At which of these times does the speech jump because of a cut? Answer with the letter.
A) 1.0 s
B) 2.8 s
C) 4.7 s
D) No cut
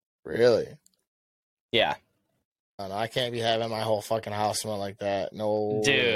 B